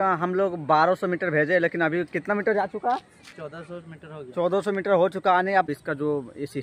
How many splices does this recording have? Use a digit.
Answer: 1